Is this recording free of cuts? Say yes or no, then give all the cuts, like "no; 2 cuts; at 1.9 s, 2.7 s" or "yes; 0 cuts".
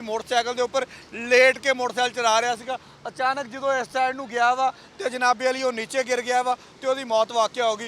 yes; 0 cuts